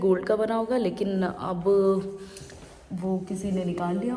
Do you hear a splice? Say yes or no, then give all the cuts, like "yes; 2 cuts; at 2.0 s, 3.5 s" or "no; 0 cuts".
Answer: no; 0 cuts